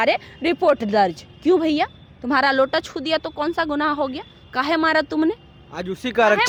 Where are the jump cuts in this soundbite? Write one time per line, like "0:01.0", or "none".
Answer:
none